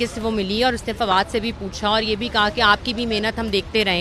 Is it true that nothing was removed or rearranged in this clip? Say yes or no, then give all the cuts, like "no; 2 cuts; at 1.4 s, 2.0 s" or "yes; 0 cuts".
yes; 0 cuts